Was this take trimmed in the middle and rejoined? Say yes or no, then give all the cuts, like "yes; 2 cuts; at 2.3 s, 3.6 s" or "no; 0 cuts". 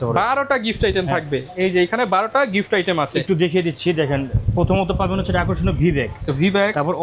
no; 0 cuts